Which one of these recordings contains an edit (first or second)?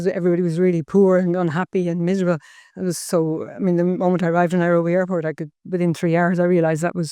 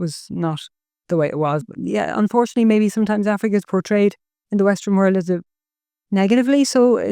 second